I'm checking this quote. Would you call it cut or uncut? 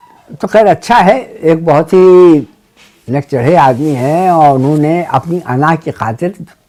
uncut